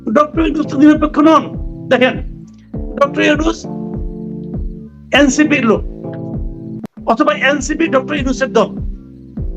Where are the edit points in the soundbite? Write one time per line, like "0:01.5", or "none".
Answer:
0:03.6
0:05.0
0:08.7